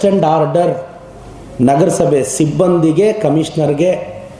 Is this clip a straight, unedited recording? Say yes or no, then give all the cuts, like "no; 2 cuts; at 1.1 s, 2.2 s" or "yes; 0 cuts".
yes; 0 cuts